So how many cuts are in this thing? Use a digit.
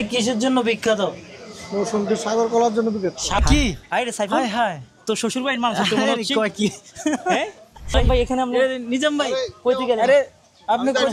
2